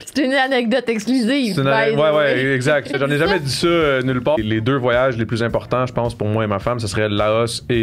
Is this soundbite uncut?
no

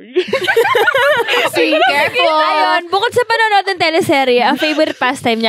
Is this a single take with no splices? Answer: yes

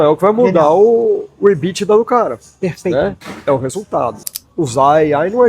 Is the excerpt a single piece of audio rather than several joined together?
no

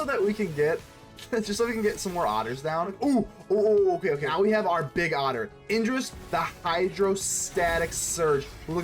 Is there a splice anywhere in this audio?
yes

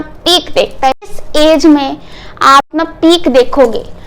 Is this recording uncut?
no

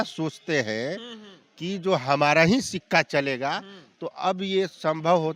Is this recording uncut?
yes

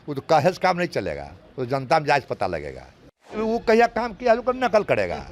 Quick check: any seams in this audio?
yes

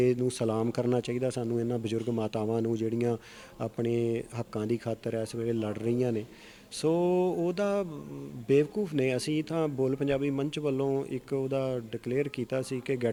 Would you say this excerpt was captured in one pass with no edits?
yes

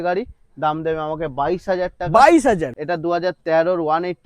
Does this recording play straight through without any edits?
no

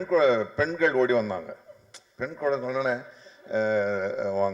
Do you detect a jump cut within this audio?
no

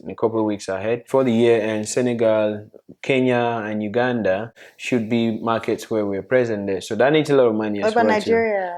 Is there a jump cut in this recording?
yes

